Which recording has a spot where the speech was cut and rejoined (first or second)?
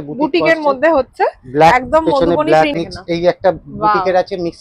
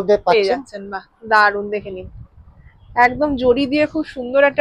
first